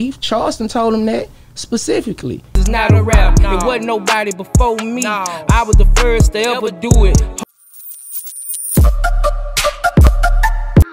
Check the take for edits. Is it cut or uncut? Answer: cut